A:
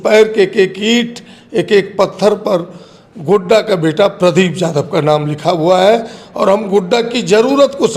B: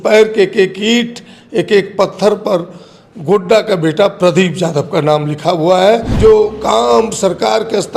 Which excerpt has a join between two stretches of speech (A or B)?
B